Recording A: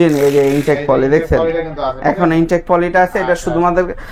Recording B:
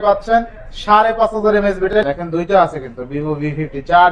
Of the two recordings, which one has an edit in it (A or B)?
B